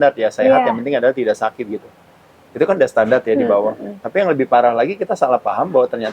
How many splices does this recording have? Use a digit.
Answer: 0